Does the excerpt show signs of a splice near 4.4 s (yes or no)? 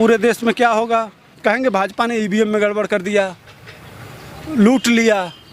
no